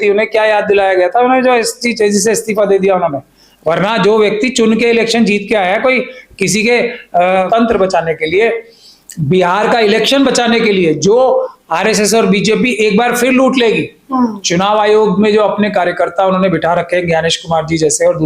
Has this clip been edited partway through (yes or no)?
yes